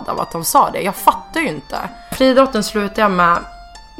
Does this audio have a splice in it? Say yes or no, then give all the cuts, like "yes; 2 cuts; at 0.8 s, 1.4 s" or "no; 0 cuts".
yes; 1 cut; at 2.1 s